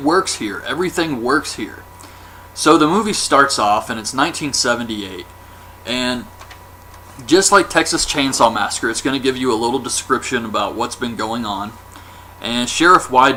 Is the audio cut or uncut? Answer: uncut